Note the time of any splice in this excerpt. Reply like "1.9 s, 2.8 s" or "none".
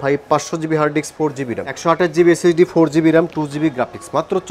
1.7 s

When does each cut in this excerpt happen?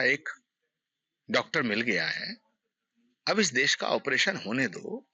none

